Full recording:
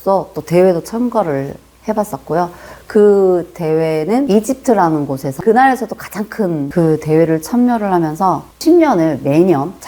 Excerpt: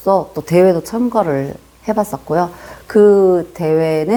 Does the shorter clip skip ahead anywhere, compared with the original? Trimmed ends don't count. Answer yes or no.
no